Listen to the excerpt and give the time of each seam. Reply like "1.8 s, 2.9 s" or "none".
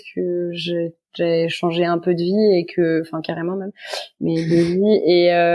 none